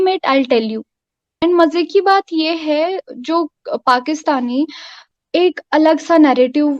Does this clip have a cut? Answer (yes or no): yes